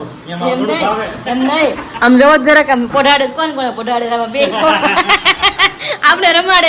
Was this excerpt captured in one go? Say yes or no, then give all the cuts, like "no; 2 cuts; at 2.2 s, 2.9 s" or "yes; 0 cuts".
yes; 0 cuts